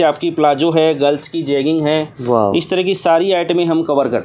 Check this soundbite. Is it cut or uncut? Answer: uncut